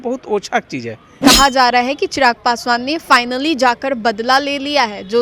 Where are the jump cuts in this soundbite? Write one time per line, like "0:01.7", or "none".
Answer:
0:01.2